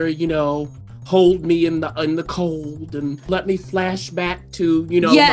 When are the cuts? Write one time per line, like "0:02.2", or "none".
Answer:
0:03.3